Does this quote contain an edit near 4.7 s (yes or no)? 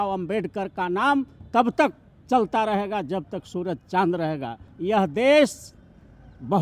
yes